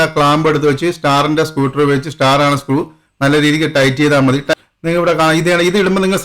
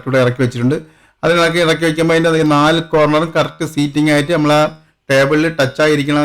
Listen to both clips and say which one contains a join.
first; 1 cut; at 4.5 s

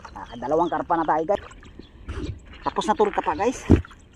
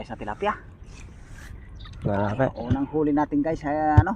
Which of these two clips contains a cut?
first; 1 cut; at 1.4 s

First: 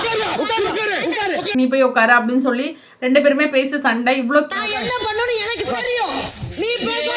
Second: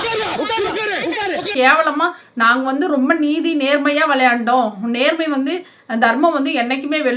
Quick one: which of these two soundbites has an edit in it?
first; 2 cuts; at 1.5 s, 4.5 s

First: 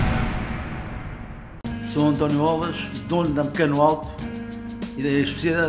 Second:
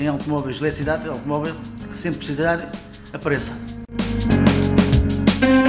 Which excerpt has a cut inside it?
first; 1 cut; at 1.7 s

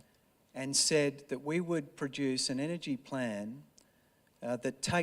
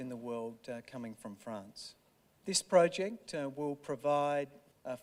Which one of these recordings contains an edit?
first; 1 cut; at 1.3 s

